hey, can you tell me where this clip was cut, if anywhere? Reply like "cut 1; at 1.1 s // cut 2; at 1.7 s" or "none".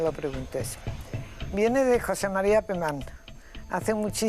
none